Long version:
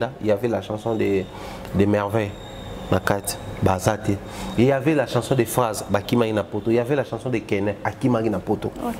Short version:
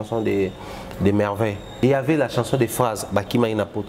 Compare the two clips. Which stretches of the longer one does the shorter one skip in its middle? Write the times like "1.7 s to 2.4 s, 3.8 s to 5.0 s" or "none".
2.6 s to 4.6 s